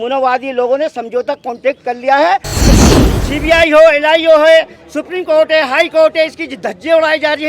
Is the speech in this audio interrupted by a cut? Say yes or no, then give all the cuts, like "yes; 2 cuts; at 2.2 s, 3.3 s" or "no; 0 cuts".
yes; 1 cut; at 2.8 s